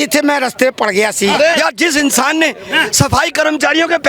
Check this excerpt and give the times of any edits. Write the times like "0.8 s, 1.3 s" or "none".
1.6 s